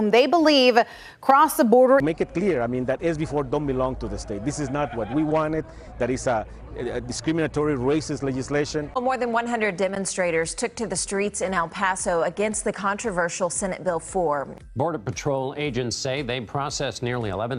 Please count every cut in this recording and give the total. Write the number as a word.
zero